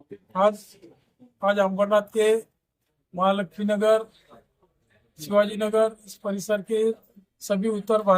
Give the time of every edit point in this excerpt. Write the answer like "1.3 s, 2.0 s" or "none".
none